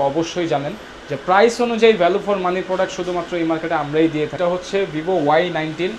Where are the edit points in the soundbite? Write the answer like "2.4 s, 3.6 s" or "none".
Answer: 4.3 s